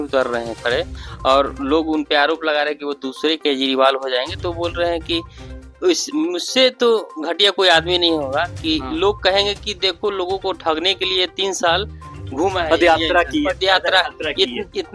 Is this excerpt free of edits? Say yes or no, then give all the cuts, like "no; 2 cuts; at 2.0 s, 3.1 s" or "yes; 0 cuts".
yes; 0 cuts